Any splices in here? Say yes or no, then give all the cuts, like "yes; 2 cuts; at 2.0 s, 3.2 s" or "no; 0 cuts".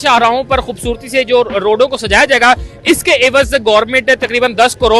no; 0 cuts